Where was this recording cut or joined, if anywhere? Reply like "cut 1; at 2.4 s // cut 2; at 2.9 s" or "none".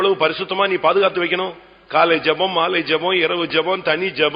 none